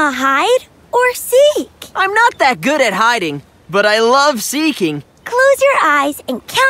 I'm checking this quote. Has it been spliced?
no; 0 cuts

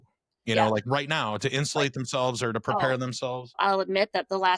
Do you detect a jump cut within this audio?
yes; 1 cut; at 3.6 s

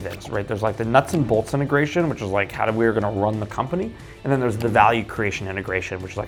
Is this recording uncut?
yes; 0 cuts

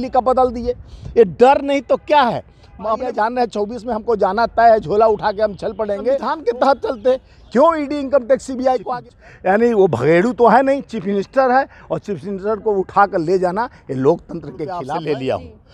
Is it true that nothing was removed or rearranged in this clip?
no; 4 cuts; at 3.0 s, 6.3 s, 8.8 s, 14.8 s

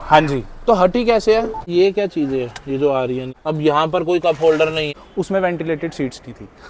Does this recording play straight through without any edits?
no; 3 cuts; at 1.7 s, 3.3 s, 5.0 s

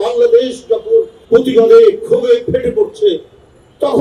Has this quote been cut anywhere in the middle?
yes; 1 cut; at 1.2 s

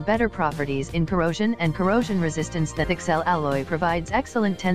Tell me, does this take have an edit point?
yes; 1 cut; at 2.8 s

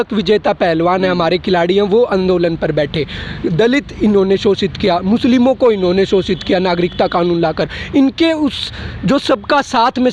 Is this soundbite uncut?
yes; 0 cuts

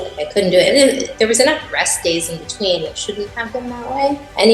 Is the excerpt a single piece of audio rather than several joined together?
yes; 0 cuts

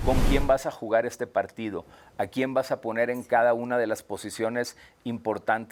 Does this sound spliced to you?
no; 0 cuts

